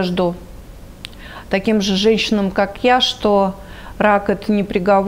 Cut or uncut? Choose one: uncut